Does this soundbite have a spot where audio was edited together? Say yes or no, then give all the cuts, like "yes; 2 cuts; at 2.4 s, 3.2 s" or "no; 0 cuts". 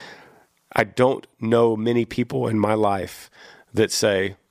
no; 0 cuts